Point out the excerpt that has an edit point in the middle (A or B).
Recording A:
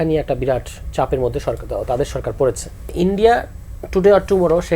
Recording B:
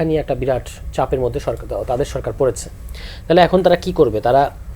A